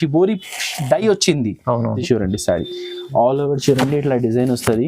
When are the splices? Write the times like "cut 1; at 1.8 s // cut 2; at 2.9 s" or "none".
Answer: cut 1; at 2.0 s